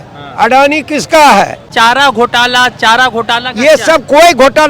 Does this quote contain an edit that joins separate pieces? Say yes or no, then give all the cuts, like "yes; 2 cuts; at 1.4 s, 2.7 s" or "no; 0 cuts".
yes; 1 cut; at 1.6 s